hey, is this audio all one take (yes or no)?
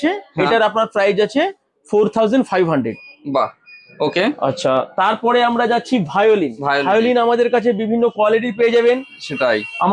yes